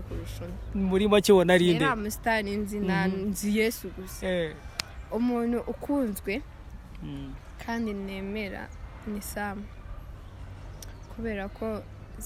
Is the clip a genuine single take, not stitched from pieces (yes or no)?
yes